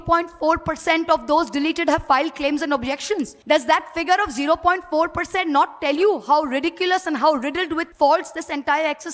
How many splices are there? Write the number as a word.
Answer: two